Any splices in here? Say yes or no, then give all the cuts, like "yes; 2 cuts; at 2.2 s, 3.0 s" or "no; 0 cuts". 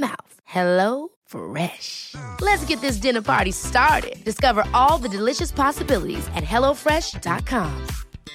no; 0 cuts